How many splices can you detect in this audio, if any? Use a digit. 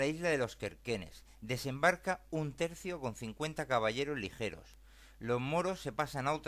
1